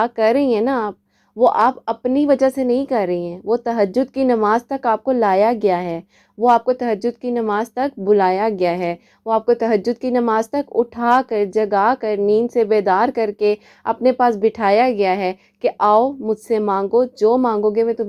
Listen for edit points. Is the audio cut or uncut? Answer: uncut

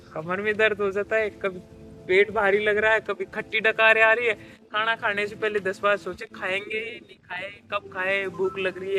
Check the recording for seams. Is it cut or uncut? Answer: uncut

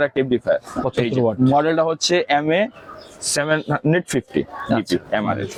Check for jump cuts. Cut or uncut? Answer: uncut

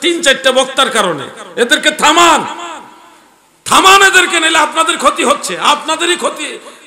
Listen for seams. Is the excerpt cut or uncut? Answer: uncut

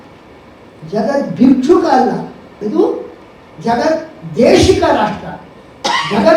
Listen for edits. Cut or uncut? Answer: cut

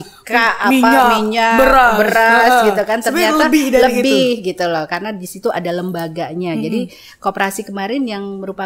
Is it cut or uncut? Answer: uncut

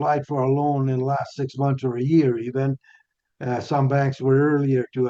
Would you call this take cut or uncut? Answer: uncut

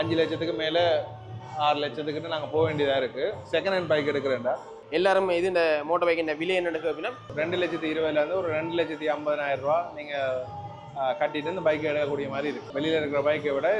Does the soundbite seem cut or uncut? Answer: cut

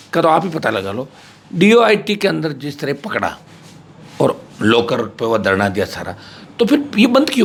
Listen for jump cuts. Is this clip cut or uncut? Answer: uncut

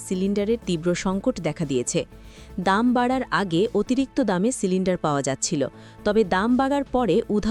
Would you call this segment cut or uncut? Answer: uncut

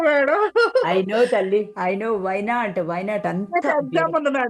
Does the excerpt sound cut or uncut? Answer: uncut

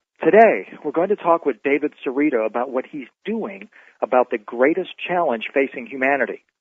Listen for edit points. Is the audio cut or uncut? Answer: uncut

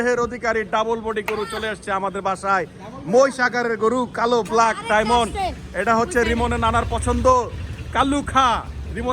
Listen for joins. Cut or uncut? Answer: uncut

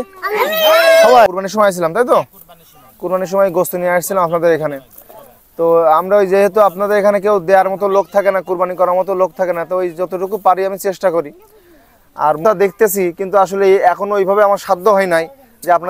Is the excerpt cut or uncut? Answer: cut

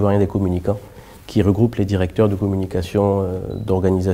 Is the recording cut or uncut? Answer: uncut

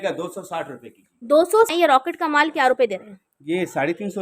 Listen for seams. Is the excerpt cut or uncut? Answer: cut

